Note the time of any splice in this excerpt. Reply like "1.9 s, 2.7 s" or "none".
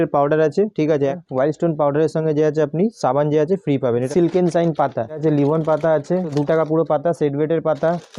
1.2 s, 4.1 s, 5.2 s, 6.3 s